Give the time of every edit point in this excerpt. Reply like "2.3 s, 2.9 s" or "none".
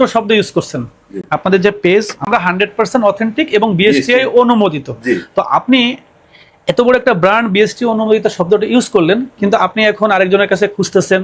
2.3 s